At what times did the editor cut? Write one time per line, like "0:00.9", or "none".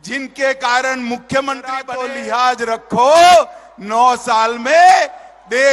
0:01.9